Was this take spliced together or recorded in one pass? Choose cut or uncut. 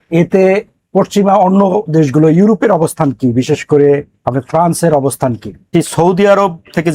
cut